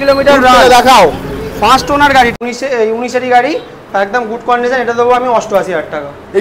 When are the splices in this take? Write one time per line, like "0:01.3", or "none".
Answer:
0:02.3